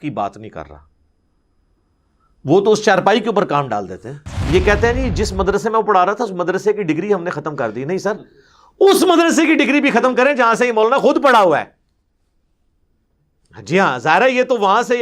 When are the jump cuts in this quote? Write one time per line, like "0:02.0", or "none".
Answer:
0:04.3